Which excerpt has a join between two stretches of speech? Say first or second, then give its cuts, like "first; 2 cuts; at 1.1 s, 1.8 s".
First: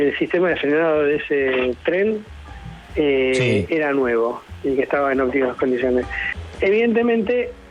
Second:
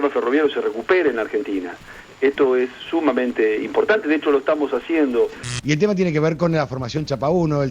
second; 1 cut; at 5.4 s